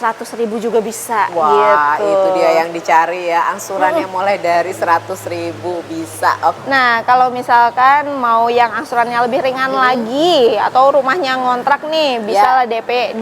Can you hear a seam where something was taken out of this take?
yes; 1 cut; at 6.6 s

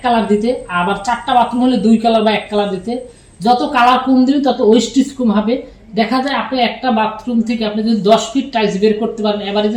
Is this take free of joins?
yes; 0 cuts

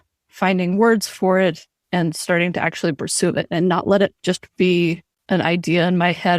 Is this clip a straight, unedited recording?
no; 2 cuts; at 1.7 s, 5.1 s

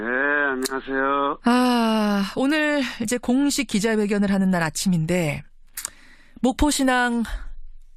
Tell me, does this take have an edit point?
yes; 1 cut; at 3.6 s

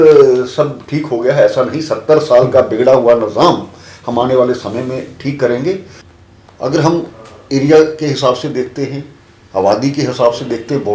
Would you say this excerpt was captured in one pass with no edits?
no; 1 cut; at 6.0 s

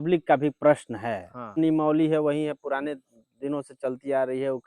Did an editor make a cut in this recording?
yes; 1 cut; at 1.6 s

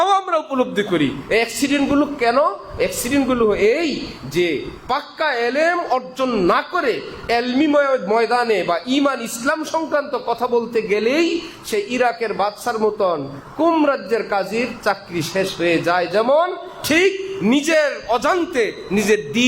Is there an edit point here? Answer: no; 0 cuts

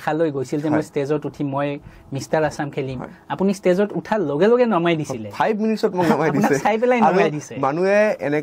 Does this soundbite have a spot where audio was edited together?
no; 0 cuts

